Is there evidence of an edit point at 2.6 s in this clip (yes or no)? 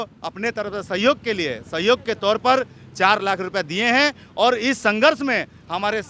no